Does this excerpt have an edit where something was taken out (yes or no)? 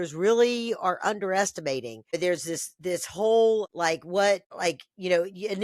yes